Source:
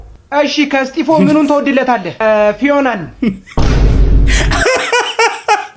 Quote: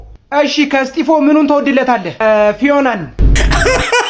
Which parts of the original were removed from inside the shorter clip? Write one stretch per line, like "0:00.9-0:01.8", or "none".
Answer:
0:03.1-0:04.1